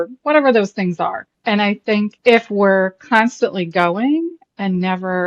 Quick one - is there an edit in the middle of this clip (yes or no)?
yes